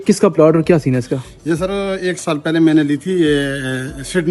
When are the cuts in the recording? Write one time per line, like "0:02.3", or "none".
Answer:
none